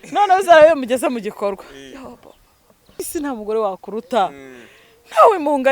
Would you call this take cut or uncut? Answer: cut